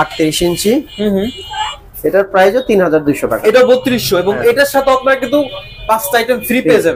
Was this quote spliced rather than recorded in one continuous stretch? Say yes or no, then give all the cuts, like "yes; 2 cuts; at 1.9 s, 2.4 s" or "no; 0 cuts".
no; 0 cuts